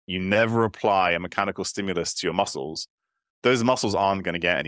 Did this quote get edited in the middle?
no; 0 cuts

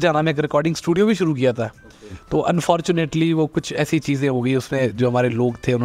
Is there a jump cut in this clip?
no; 0 cuts

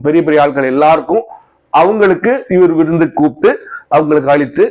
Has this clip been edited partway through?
no; 0 cuts

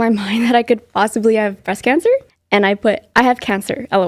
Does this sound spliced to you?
yes; 1 cut; at 2.3 s

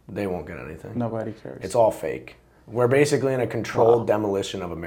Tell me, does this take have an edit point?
no; 0 cuts

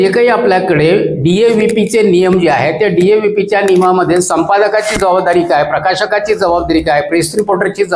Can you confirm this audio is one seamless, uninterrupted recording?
yes; 0 cuts

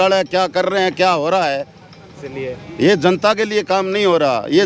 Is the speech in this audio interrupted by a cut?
no; 0 cuts

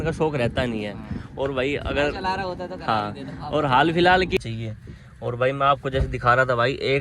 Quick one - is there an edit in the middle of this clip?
yes; 1 cut; at 4.4 s

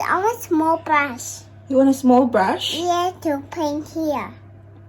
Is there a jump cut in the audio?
no; 0 cuts

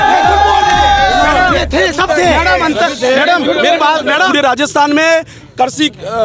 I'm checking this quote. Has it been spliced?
yes; 1 cut; at 4.3 s

